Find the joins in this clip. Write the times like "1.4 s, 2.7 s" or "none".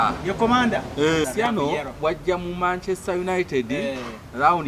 1.2 s